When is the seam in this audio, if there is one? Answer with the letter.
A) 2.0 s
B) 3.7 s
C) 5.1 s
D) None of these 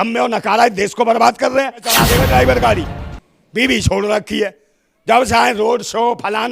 A